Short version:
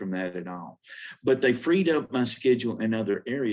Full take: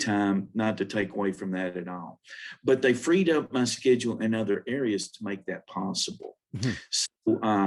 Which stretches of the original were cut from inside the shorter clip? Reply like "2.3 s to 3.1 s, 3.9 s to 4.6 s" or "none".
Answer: none